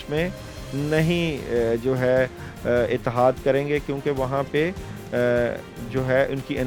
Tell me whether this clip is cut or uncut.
uncut